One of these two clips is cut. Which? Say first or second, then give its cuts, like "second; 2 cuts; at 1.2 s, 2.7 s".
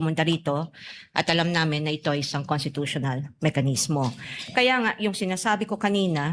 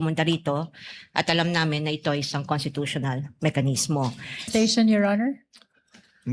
second; 1 cut; at 4.5 s